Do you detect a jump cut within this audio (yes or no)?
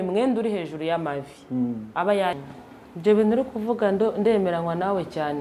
yes